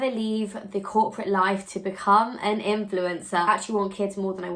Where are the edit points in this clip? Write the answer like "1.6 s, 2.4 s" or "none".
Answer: 3.5 s